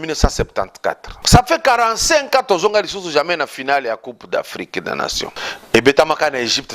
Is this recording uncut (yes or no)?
no